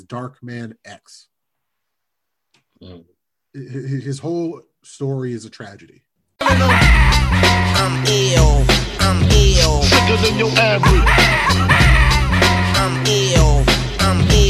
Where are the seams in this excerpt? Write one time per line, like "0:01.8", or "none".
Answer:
0:06.2